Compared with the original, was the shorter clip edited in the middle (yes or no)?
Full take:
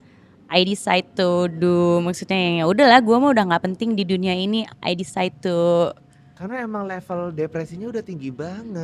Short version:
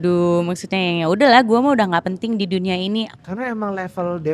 yes